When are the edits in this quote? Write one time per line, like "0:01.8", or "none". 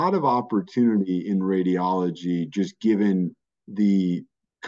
none